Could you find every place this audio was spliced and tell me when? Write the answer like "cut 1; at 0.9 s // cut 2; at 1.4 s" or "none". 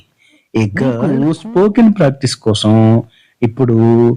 cut 1; at 1.0 s